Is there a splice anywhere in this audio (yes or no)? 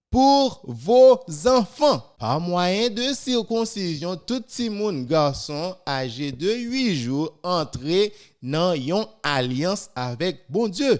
yes